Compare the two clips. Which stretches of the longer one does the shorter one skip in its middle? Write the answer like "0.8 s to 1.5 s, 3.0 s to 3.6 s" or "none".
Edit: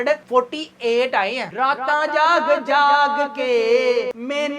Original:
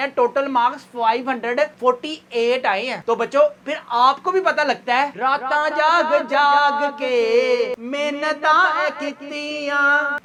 3.0 s to 5.1 s